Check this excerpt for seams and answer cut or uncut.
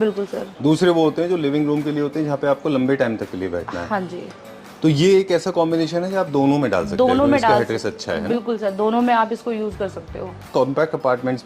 cut